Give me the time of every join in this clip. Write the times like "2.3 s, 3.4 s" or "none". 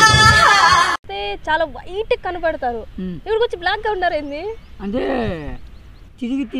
1.1 s